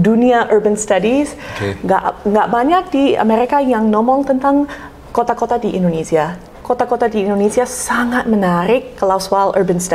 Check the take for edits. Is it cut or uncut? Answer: cut